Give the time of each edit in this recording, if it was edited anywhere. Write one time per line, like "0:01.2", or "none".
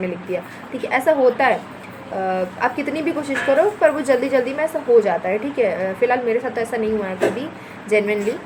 none

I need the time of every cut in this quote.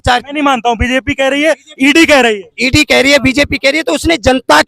0:02.5

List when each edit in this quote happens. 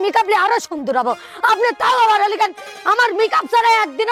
none

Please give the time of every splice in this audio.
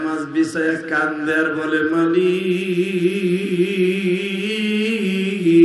none

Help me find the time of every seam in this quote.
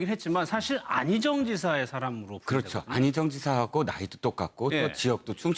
0:03.0

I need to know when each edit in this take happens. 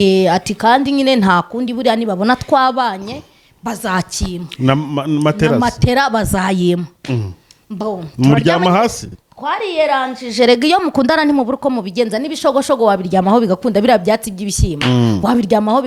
none

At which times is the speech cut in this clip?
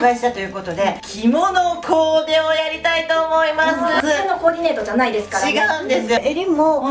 0:01.1
0:04.0
0:06.2

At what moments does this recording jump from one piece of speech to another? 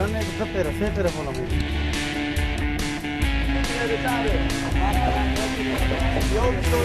0:03.8

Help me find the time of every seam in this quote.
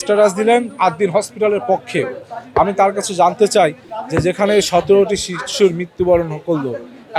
none

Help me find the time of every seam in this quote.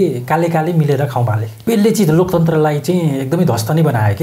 0:01.5

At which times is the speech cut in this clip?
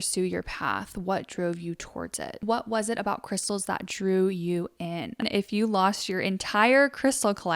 0:02.4
0:05.2

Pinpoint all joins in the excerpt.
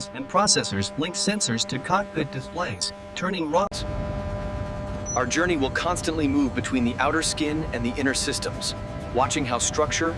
none

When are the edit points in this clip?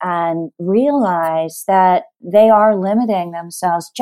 none

